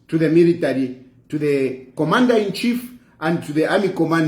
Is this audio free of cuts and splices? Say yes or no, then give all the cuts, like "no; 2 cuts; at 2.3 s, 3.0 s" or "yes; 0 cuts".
yes; 0 cuts